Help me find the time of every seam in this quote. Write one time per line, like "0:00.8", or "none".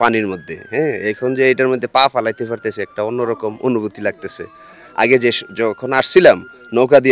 none